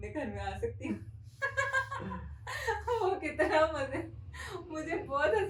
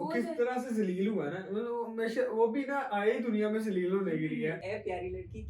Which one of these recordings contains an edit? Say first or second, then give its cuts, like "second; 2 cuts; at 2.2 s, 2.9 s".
second; 1 cut; at 4.6 s